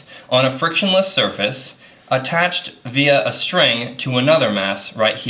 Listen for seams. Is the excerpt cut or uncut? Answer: uncut